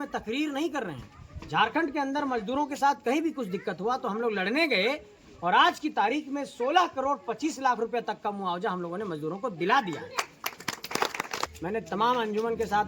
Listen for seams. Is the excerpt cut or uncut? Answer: cut